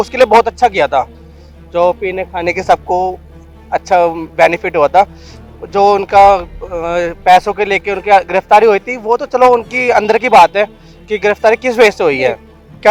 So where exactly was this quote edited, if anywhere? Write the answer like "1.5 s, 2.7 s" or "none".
none